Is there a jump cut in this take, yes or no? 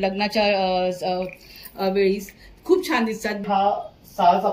yes